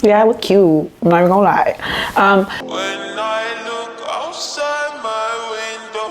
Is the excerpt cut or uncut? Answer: cut